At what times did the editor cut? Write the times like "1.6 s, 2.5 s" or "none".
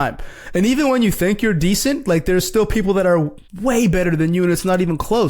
3.4 s

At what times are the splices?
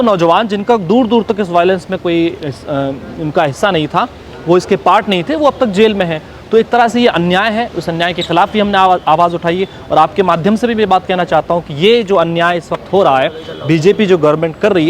none

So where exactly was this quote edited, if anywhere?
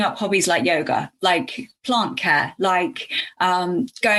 none

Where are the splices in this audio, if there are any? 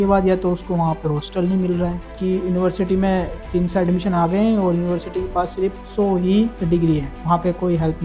2.0 s, 7.1 s

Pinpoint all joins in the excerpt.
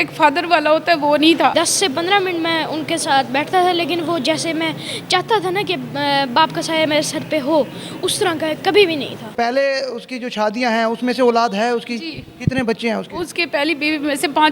1.5 s, 9.3 s

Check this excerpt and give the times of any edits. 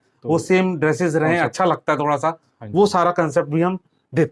none

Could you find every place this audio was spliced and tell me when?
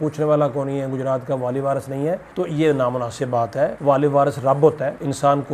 none

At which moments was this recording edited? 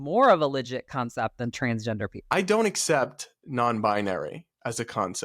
2.3 s

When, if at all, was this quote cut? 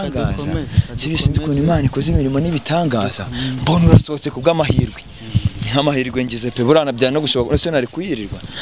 none

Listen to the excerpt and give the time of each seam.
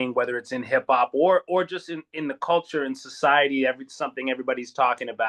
none

